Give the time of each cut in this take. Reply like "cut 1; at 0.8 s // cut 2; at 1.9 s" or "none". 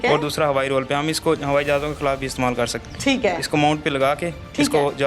cut 1; at 2.8 s